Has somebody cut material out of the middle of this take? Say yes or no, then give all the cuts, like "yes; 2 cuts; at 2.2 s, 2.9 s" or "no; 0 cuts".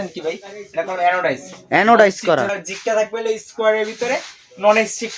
yes; 1 cut; at 2.6 s